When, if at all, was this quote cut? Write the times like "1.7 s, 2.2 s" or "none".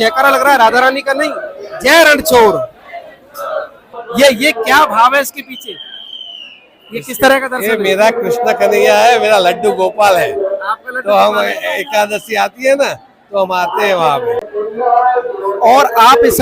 4.0 s, 14.5 s